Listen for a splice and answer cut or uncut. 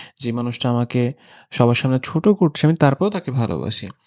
uncut